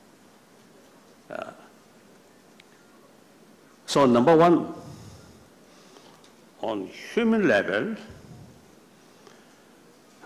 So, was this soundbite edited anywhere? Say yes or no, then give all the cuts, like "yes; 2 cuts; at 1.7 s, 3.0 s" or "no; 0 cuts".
yes; 1 cut; at 1.5 s